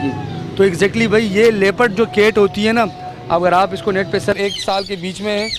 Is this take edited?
yes; 1 cut; at 4.3 s

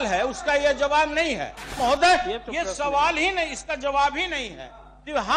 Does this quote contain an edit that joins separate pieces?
yes; 1 cut; at 1.8 s

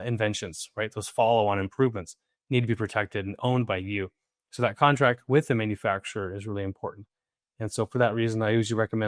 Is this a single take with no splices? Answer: yes; 0 cuts

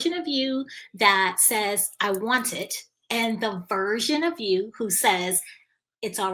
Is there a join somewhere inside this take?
no; 0 cuts

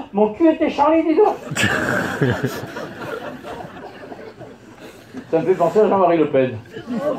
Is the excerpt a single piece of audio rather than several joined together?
no; 1 cut; at 3.6 s

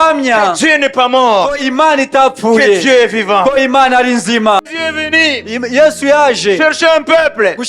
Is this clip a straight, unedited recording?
no; 1 cut; at 4.7 s

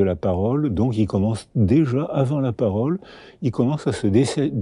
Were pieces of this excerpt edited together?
no; 0 cuts

